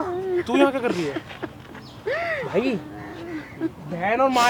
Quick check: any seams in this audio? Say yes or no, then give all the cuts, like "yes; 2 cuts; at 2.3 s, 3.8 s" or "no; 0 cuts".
no; 0 cuts